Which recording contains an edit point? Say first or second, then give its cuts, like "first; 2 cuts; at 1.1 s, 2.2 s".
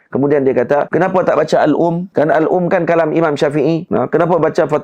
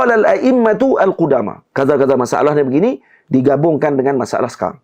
first; 3 cuts; at 0.9 s, 2.0 s, 3.8 s